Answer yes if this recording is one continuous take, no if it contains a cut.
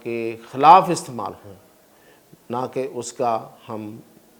yes